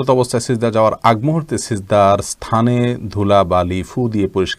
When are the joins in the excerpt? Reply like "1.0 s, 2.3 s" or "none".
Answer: none